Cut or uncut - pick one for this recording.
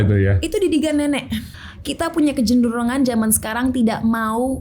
cut